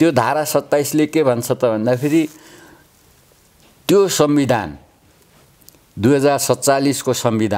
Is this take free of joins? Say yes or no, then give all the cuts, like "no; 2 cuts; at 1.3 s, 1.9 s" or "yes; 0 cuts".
yes; 0 cuts